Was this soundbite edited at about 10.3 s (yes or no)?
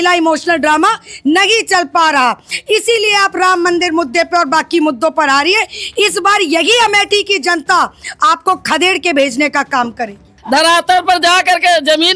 yes